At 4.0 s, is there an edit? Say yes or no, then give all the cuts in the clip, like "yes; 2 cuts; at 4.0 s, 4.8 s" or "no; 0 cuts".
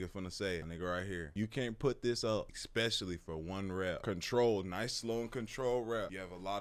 no; 0 cuts